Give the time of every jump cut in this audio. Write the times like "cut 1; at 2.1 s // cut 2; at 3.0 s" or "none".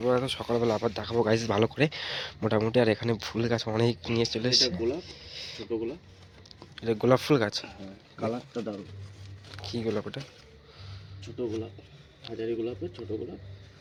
none